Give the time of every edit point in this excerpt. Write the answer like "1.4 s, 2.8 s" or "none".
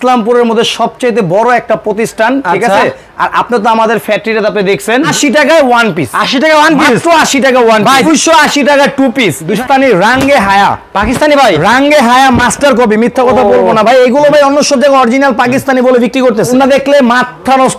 5.1 s, 8.1 s, 9.6 s, 16.5 s